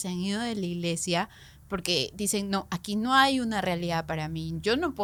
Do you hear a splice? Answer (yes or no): no